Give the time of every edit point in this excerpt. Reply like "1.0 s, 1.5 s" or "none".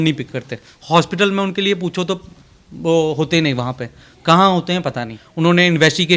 5.2 s